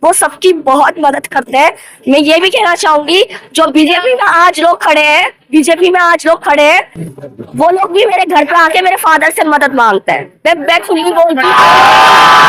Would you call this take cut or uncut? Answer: cut